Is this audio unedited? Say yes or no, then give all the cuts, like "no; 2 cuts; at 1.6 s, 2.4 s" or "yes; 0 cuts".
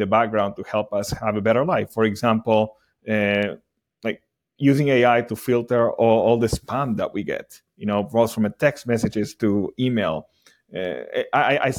yes; 0 cuts